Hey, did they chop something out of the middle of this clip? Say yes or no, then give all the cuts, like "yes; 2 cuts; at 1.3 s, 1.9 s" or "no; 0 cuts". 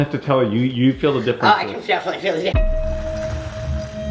yes; 1 cut; at 2.7 s